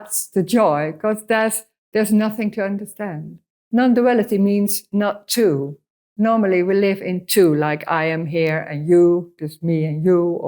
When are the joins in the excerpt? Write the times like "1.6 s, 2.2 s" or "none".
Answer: 3.5 s